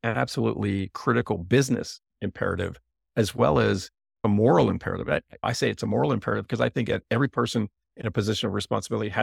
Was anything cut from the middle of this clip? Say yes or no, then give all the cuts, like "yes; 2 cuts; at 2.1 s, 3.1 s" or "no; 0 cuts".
yes; 1 cut; at 2.1 s